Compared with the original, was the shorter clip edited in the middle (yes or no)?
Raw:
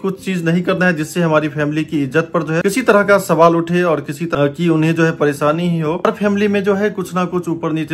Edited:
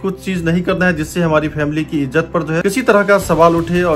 no